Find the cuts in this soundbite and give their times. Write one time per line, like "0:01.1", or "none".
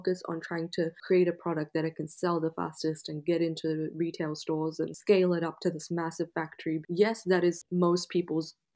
0:01.0
0:05.0
0:06.8
0:07.6